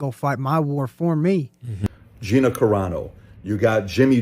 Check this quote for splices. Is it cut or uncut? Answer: cut